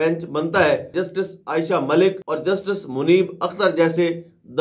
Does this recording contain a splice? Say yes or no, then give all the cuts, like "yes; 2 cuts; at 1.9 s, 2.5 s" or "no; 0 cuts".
yes; 2 cuts; at 0.9 s, 2.3 s